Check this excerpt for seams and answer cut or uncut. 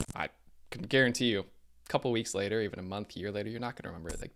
uncut